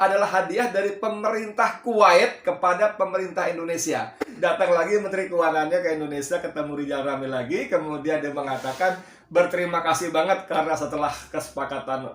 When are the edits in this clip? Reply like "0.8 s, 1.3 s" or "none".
4.3 s